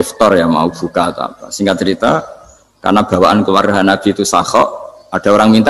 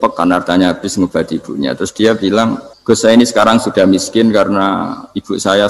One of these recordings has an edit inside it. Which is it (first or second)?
second